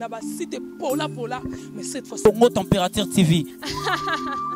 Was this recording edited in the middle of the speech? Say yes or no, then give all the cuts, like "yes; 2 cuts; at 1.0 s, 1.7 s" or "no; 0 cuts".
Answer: no; 0 cuts